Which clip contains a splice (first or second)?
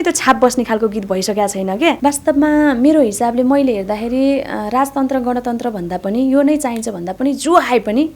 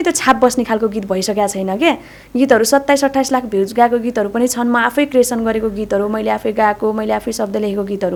first